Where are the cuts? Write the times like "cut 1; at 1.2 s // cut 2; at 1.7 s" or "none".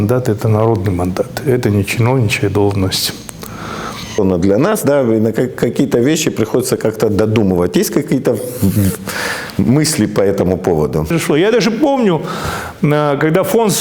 cut 1; at 4.2 s // cut 2; at 11.1 s